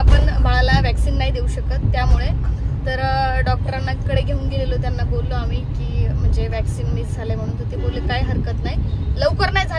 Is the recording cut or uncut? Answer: uncut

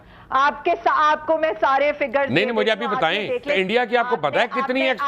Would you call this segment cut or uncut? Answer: cut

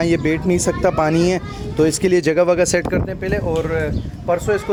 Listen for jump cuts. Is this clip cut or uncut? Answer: uncut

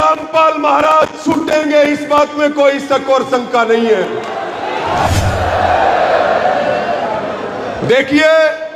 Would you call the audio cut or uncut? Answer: cut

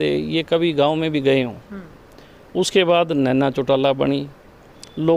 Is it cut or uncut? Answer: uncut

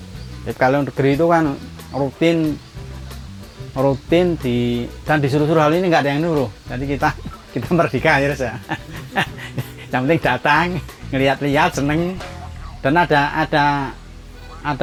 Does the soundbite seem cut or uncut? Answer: uncut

